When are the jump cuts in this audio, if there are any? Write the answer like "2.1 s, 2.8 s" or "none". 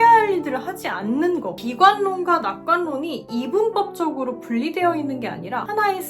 1.5 s